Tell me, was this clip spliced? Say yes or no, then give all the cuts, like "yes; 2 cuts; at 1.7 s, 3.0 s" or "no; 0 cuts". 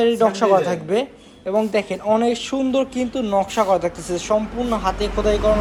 no; 0 cuts